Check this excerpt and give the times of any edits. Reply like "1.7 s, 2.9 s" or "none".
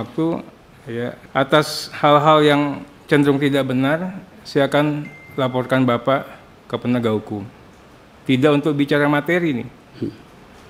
1.2 s